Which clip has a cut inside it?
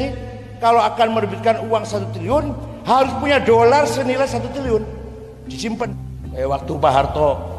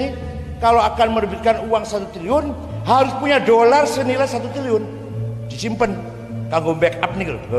first; 1 cut; at 6.1 s

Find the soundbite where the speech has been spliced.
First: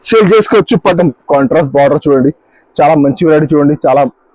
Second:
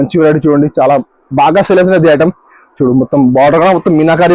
first; 1 cut; at 0.9 s

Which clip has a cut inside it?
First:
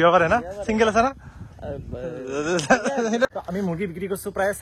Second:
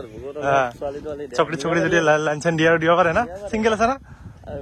first; 1 cut; at 3.2 s

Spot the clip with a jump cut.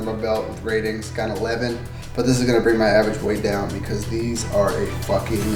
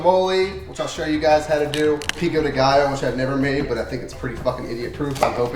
second; 1 cut; at 2.2 s

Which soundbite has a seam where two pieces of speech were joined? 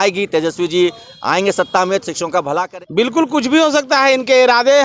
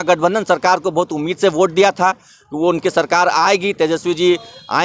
first; 1 cut; at 2.6 s

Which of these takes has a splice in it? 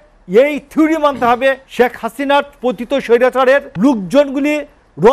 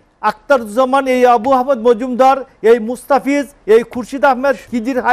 first; 2 cuts; at 1.6 s, 3.7 s

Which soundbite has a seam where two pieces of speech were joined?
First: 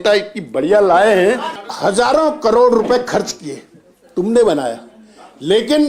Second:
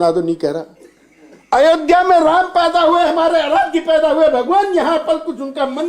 first; 1 cut; at 1.5 s

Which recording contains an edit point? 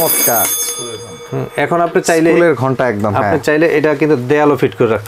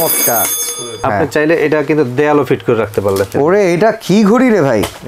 second; 2 cuts; at 1.0 s, 3.3 s

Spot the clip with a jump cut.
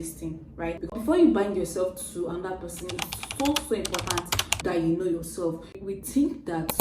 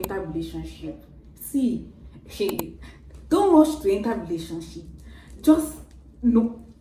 first; 2 cuts; at 0.8 s, 5.7 s

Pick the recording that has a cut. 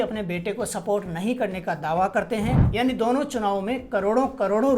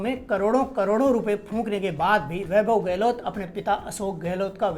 first; 1 cut; at 2.6 s

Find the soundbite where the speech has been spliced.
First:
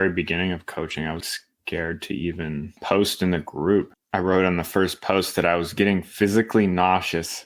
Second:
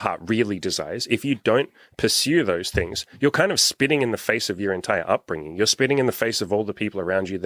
first; 3 cuts; at 1.2 s, 2.7 s, 4.0 s

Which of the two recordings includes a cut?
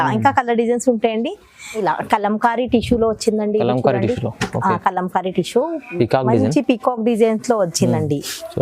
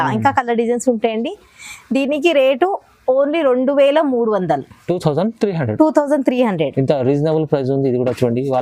first; 1 cut; at 1.8 s

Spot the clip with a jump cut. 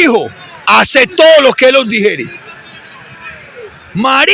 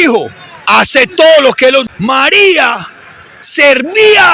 second; 1 cut; at 1.9 s

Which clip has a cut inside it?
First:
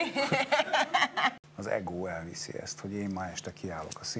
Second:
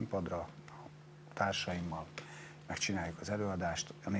first; 1 cut; at 1.4 s

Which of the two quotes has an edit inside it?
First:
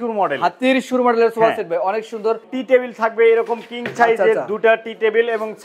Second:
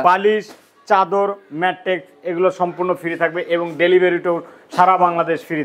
first; 1 cut; at 2.5 s

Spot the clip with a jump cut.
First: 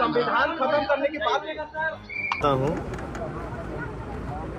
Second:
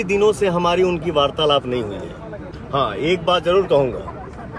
first; 1 cut; at 2.4 s

